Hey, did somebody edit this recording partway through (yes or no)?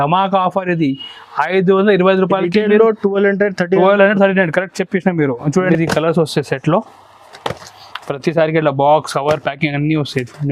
yes